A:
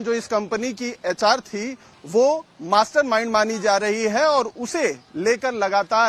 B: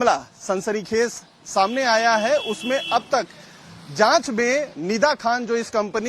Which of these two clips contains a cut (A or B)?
B